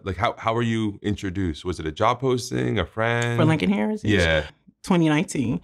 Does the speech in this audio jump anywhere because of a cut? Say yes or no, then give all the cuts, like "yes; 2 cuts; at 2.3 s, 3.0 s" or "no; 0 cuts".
yes; 1 cut; at 4.5 s